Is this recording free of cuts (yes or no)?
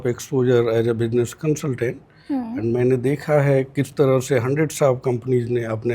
yes